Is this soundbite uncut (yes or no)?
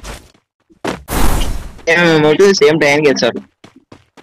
yes